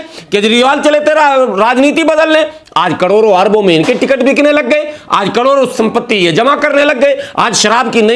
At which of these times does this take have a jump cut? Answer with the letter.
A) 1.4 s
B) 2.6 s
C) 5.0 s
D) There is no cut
D